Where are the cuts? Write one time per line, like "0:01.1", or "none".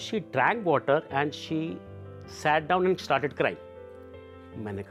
none